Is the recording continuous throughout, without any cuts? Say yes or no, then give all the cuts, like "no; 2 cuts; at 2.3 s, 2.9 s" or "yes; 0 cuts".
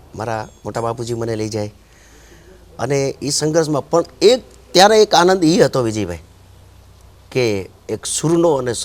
yes; 0 cuts